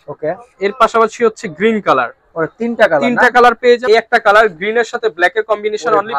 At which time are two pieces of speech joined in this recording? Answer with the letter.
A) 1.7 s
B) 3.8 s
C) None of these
B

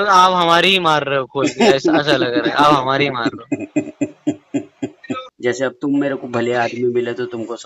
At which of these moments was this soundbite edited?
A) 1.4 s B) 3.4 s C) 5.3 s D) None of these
C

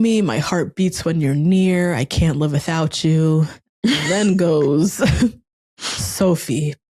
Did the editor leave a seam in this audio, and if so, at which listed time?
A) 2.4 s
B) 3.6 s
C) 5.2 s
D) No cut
B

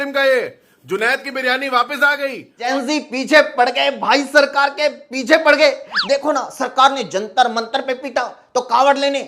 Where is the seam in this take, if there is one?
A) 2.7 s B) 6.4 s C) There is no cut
A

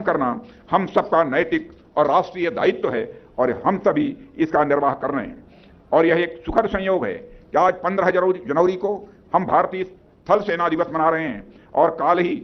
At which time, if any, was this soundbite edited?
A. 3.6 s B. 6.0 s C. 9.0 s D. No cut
D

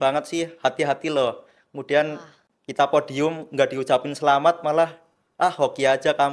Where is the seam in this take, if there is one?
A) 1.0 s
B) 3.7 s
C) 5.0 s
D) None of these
D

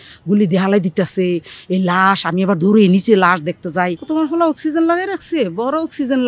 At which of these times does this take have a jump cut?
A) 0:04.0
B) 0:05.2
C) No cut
A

